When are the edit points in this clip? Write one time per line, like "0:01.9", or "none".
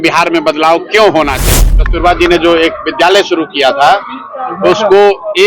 0:01.6